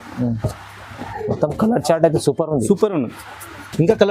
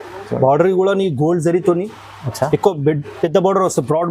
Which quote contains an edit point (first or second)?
first